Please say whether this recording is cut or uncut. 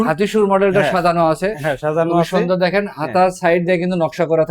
uncut